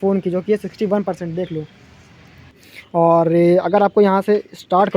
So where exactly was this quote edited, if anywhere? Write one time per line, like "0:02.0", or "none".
0:02.5